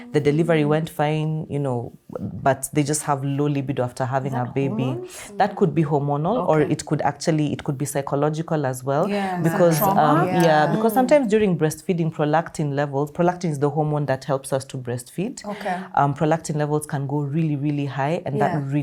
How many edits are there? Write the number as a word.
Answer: zero